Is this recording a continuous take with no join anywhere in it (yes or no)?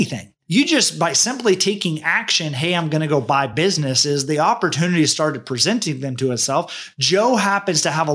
yes